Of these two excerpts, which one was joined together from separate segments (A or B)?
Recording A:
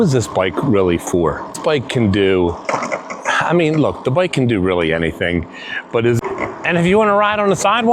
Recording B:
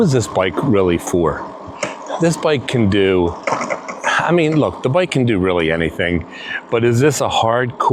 A